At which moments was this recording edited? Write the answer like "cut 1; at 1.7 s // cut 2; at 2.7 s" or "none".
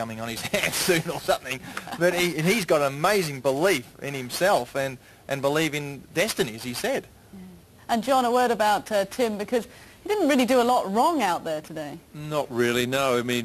cut 1; at 4.8 s